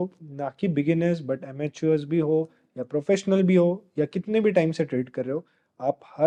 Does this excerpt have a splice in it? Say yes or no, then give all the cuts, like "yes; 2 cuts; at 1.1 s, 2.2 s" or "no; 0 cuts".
no; 0 cuts